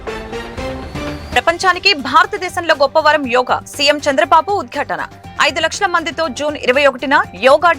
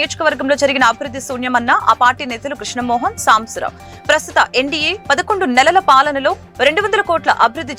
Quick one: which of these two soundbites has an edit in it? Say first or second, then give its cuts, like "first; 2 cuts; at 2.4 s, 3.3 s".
first; 1 cut; at 1.3 s